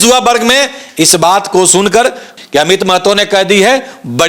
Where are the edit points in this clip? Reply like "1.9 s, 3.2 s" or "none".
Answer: 2.3 s